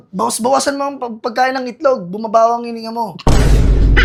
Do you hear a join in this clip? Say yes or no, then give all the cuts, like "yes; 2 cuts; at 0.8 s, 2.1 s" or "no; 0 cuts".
no; 0 cuts